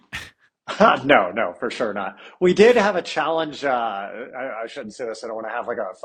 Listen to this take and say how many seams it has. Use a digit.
0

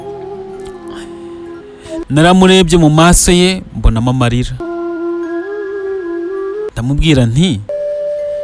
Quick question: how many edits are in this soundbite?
0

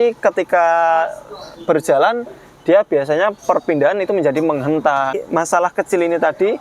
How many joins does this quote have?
1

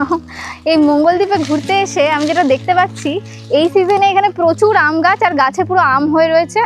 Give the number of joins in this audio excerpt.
0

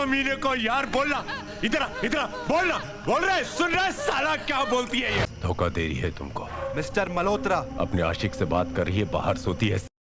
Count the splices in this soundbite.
1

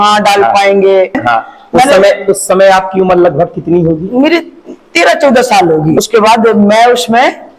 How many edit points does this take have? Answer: 2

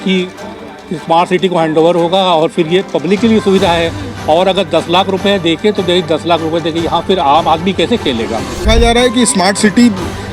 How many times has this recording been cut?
1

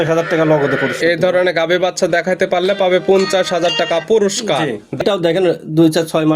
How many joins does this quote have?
1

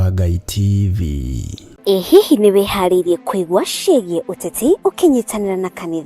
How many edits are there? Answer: 1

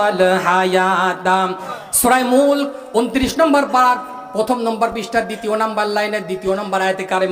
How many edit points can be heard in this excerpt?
1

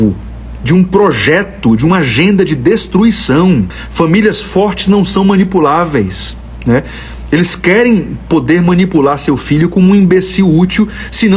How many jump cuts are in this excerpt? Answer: 1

